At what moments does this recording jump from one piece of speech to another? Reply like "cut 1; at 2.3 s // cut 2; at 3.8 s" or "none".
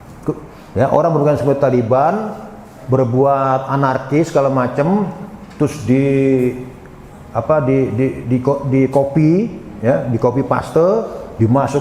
none